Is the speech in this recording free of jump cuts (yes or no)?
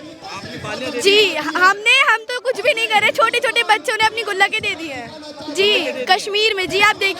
yes